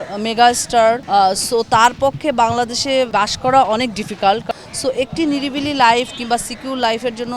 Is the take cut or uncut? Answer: cut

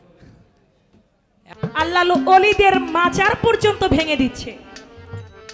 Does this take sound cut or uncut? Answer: cut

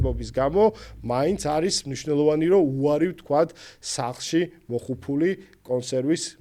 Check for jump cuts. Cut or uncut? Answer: uncut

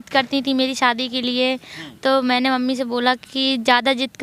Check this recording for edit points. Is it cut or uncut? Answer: uncut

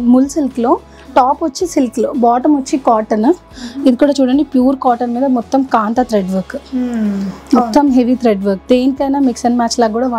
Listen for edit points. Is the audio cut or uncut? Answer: uncut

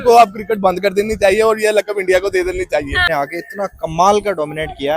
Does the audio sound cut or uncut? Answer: cut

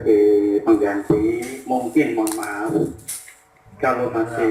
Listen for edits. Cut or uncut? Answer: uncut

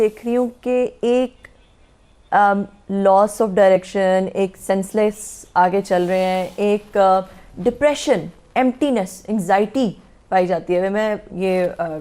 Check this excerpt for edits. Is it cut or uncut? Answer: uncut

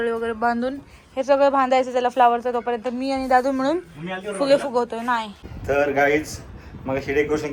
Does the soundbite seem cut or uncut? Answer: uncut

